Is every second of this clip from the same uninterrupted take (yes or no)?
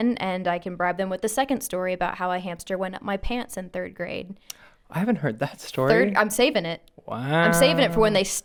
yes